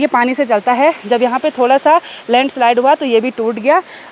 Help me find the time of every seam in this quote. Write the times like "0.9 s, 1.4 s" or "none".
none